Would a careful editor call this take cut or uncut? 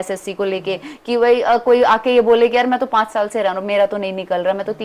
uncut